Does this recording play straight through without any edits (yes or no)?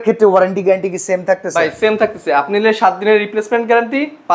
yes